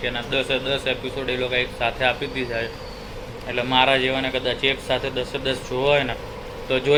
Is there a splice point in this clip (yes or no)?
no